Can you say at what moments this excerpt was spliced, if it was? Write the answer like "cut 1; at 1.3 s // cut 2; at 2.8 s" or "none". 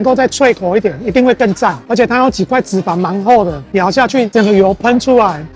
none

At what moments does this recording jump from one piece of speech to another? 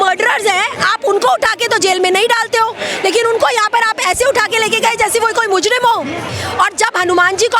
cut 1; at 6.3 s

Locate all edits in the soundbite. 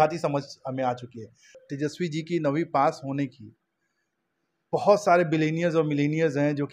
cut 1; at 1.6 s

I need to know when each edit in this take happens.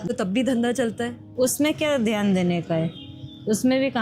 none

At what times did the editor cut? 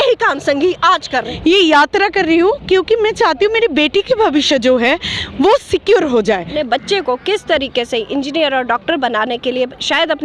cut 1; at 1.3 s // cut 2; at 6.5 s

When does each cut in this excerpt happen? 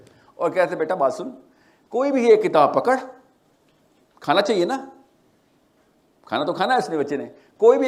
none

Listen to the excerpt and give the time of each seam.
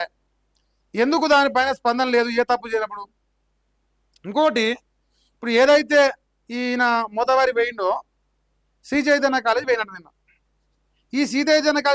none

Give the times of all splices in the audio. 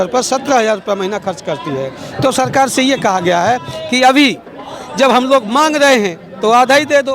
none

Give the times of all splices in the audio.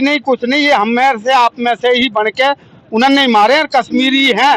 none

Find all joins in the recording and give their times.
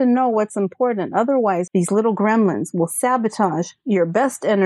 cut 1; at 1.7 s

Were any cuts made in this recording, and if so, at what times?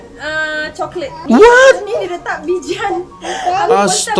none

